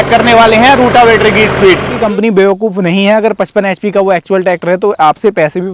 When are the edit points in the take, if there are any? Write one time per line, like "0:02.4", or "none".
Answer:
0:01.9